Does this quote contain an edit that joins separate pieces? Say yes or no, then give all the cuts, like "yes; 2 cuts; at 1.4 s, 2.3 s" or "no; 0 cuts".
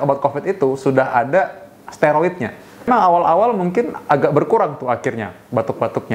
yes; 1 cut; at 2.9 s